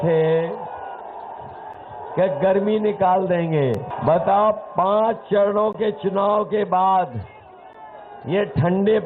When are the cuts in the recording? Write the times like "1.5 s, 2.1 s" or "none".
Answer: 3.9 s